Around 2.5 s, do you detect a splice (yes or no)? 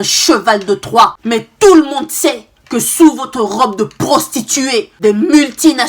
no